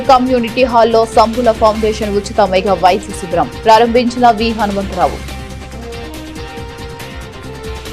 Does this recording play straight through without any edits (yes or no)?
yes